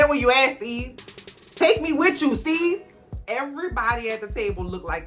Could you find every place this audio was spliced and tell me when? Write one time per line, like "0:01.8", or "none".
0:03.1